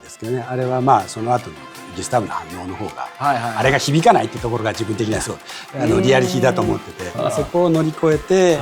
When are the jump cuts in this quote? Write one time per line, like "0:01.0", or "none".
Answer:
0:07.1